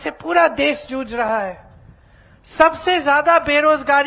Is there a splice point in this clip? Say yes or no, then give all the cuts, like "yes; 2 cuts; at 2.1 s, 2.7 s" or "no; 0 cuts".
no; 0 cuts